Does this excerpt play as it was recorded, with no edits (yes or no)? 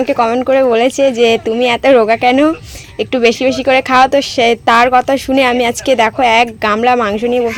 yes